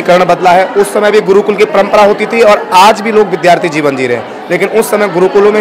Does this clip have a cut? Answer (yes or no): no